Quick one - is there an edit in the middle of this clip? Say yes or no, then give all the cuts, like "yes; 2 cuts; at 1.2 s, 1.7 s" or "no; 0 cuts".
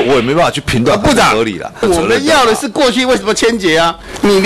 yes; 1 cut; at 1.8 s